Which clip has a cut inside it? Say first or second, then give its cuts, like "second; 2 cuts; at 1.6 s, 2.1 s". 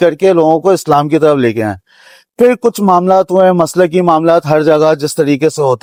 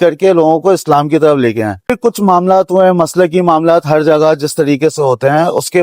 second; 1 cut; at 2.0 s